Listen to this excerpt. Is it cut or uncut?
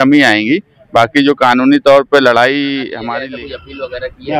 cut